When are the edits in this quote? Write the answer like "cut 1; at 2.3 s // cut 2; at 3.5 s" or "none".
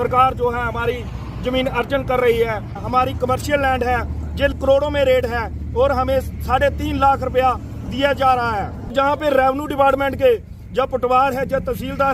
cut 1; at 2.8 s // cut 2; at 4.5 s // cut 3; at 8.9 s